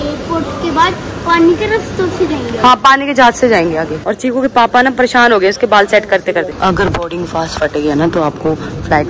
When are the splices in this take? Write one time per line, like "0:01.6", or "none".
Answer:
0:04.1
0:06.5